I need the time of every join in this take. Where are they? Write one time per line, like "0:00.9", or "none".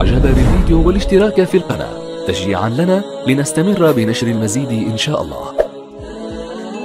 0:05.7